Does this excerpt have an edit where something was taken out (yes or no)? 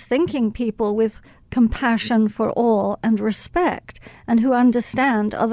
no